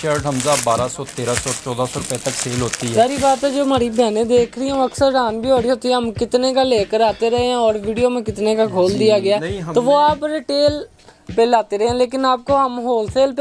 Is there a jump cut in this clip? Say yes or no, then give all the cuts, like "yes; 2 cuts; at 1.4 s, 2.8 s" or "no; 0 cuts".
no; 0 cuts